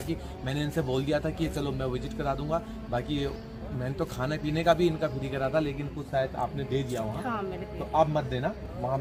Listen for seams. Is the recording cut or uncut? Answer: uncut